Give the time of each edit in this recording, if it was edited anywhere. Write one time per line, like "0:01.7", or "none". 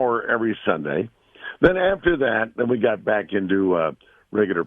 0:01.4